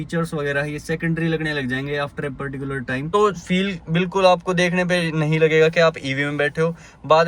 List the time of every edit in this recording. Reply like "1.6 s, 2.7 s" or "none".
3.1 s